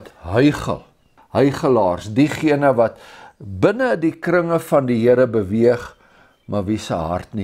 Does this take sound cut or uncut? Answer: cut